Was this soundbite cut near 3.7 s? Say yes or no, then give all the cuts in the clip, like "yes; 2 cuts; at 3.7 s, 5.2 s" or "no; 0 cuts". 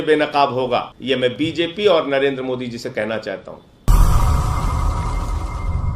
no; 1 cut; at 0.9 s